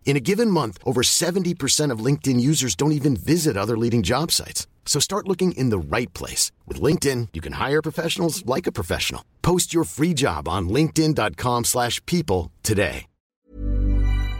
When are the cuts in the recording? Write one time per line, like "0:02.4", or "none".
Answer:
0:13.5